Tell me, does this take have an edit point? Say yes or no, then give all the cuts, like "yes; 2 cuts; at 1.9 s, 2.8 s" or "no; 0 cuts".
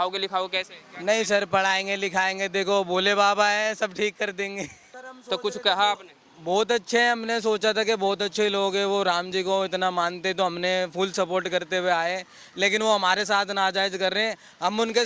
yes; 1 cut; at 4.9 s